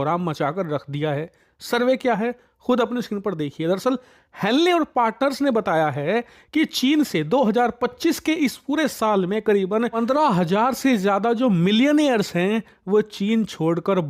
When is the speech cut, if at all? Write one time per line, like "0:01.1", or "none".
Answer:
none